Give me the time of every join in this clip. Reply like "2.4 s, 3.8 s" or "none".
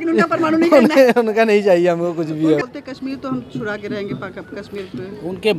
2.6 s